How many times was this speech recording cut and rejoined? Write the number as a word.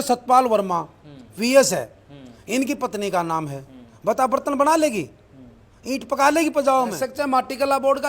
one